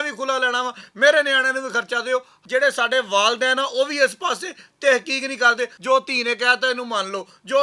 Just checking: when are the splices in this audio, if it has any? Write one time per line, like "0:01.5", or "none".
0:02.3
0:05.8